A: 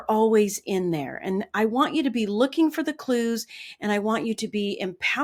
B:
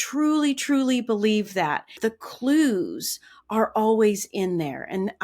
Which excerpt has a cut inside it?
B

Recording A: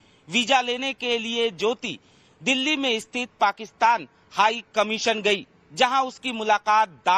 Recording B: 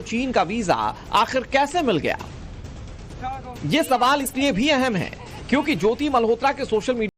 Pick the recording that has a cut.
A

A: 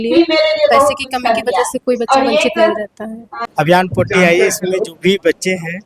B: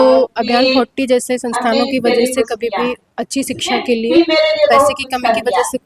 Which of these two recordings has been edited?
A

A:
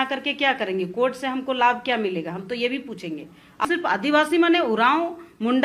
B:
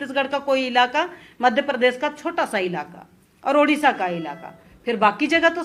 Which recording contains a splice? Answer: A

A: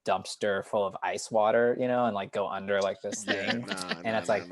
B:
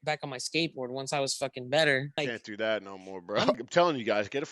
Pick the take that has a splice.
B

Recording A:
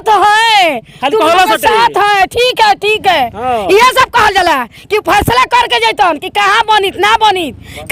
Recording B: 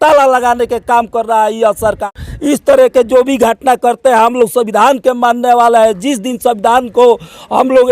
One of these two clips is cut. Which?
B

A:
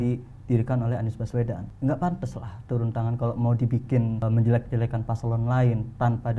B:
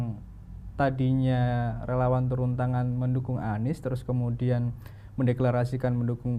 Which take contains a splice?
A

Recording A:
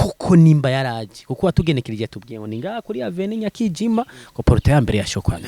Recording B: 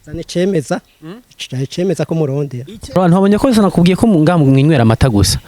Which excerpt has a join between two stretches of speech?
B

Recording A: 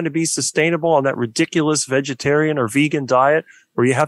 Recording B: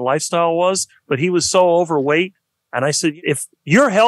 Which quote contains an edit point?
B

